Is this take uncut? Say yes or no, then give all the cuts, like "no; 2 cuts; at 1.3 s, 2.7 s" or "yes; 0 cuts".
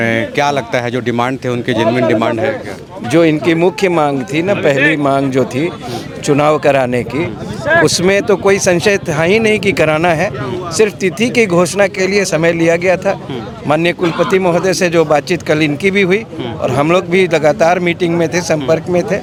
yes; 0 cuts